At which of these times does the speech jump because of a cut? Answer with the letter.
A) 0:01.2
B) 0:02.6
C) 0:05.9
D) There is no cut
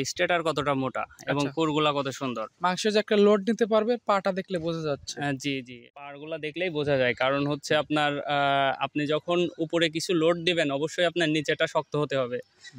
C